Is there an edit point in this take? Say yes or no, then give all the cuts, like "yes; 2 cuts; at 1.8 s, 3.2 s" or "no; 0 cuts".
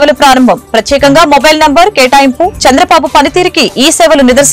no; 0 cuts